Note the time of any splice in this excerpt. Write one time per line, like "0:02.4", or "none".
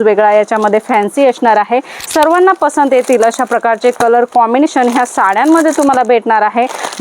0:01.9